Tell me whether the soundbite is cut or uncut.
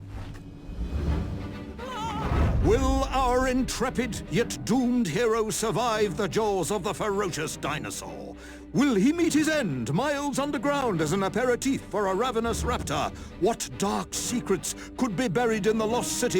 cut